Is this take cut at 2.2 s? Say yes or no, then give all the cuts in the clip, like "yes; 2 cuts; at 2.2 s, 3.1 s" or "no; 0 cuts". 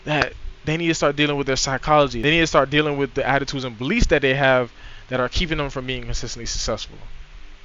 no; 0 cuts